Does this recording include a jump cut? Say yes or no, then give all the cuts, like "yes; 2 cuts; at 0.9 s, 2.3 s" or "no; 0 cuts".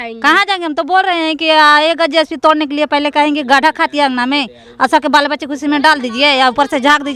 no; 0 cuts